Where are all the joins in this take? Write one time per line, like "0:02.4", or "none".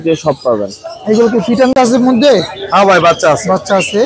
0:01.7